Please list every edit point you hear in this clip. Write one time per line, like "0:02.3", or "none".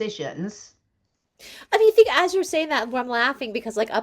none